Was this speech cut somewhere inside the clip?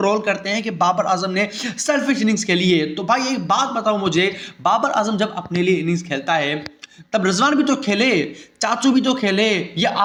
no; 0 cuts

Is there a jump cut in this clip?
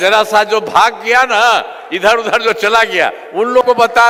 no; 0 cuts

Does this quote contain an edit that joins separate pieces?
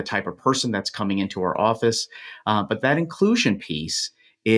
no; 0 cuts

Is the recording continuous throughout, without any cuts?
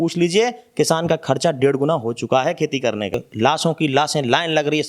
no; 1 cut; at 3.3 s

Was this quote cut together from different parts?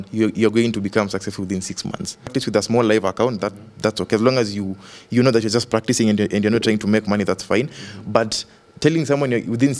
yes; 1 cut; at 2.3 s

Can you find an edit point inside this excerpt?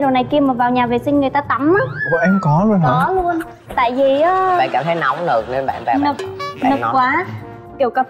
no; 0 cuts

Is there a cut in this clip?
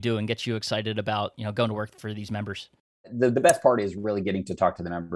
yes; 1 cut; at 3.1 s

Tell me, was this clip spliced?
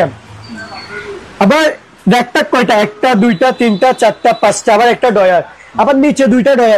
no; 0 cuts

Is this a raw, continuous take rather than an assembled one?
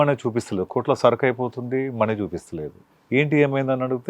no; 1 cut; at 3.0 s

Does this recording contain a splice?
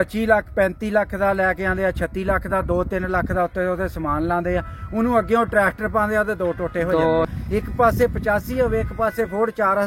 yes; 1 cut; at 7.2 s

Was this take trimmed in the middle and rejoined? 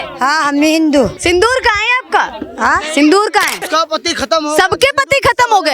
yes; 2 cuts; at 1.2 s, 3.6 s

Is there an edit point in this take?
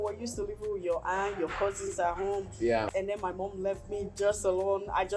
yes; 1 cut; at 2.9 s

